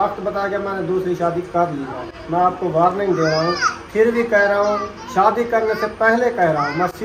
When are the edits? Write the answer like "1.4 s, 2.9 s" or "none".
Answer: none